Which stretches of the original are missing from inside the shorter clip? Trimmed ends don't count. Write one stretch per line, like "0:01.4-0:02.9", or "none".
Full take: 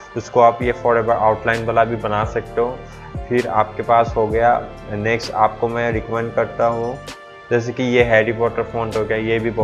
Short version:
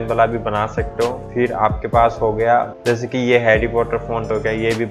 0:02.8-0:03.2
0:04.7-0:07.4